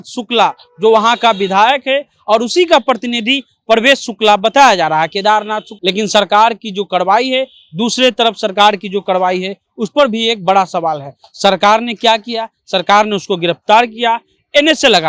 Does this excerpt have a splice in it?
yes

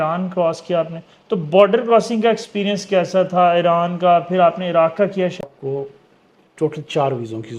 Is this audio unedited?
no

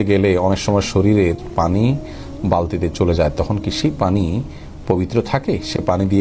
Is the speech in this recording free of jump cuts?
yes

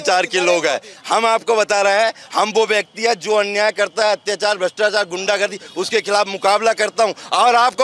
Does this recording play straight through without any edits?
yes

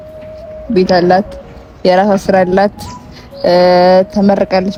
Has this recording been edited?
no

